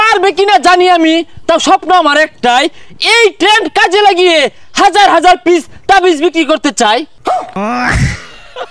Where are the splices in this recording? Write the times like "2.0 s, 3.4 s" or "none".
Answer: 7.3 s